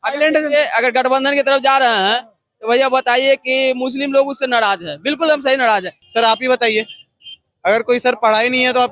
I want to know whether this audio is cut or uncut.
cut